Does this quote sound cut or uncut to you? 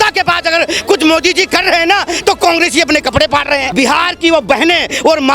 cut